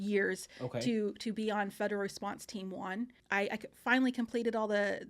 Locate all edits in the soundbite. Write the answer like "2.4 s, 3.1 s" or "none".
3.2 s